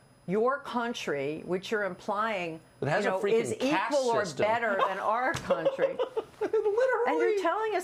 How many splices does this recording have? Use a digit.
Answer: 0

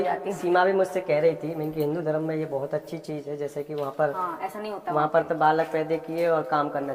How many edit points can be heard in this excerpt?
0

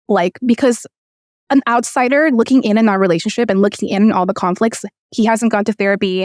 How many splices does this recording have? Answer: 0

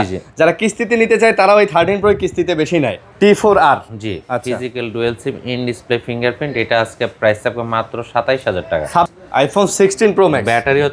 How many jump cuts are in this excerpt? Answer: 2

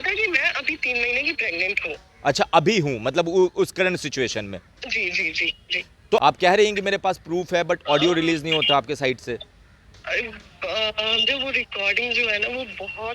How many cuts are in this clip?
1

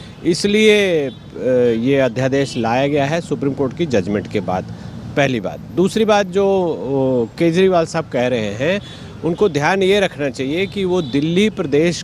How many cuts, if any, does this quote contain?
0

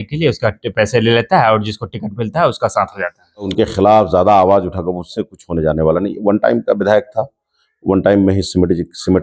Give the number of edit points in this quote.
1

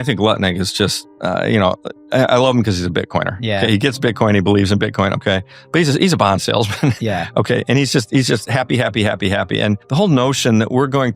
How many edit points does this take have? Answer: 1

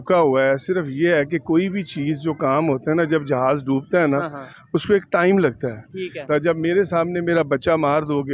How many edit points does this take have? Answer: 1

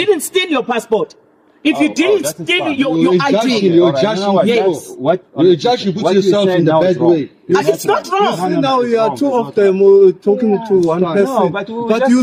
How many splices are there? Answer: 0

